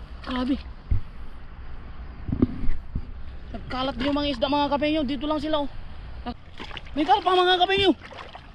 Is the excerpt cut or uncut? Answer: cut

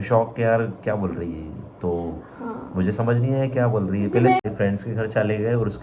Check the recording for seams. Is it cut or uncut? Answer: cut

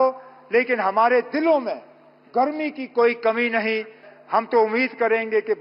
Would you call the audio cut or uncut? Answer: cut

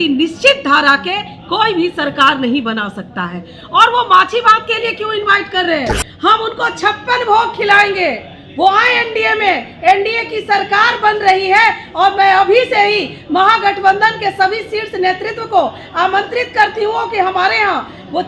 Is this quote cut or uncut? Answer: uncut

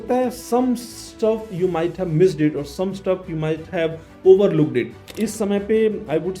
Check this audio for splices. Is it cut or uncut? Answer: cut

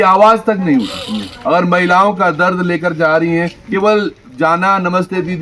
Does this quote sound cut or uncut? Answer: uncut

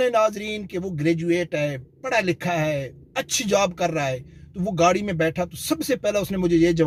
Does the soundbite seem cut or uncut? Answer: uncut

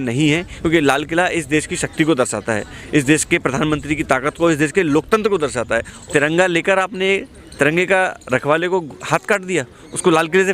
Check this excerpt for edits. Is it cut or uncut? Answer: cut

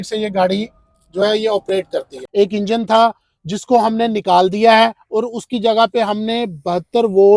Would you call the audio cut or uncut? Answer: cut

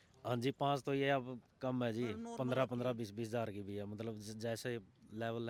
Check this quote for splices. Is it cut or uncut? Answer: uncut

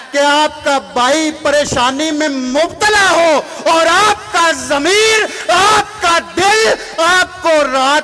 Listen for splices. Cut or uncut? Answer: uncut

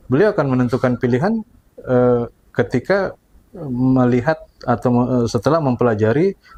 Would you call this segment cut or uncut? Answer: uncut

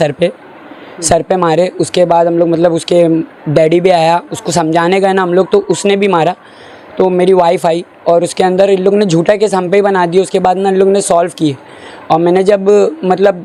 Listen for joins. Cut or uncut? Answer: uncut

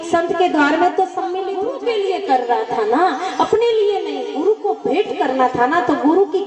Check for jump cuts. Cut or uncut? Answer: cut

